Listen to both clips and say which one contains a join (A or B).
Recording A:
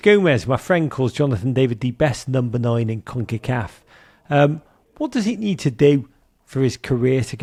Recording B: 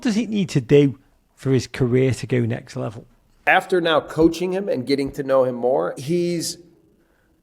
B